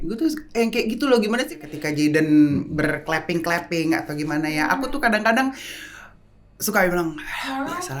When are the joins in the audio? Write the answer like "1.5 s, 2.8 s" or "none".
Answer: 1.5 s